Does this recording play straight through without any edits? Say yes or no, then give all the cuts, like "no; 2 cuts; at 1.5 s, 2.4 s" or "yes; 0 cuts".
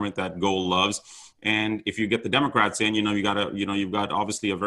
yes; 0 cuts